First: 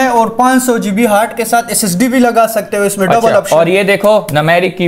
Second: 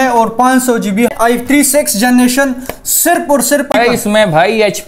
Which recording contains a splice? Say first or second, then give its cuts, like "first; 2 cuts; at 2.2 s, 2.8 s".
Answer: second; 2 cuts; at 1.1 s, 3.7 s